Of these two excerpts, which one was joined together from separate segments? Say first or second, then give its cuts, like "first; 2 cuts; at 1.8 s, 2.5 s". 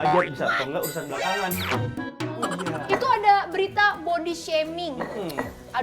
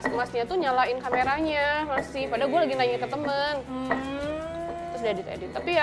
first; 1 cut; at 2.7 s